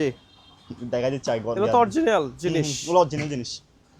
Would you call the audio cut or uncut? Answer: uncut